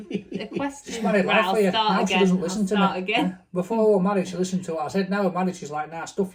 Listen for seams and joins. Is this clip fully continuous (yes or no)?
yes